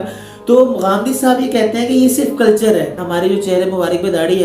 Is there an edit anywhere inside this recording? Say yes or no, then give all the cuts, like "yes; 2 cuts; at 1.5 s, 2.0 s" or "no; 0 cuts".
yes; 1 cut; at 3.0 s